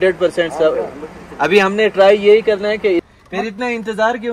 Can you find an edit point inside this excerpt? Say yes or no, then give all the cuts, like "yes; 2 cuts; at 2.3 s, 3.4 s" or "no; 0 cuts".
yes; 1 cut; at 3.0 s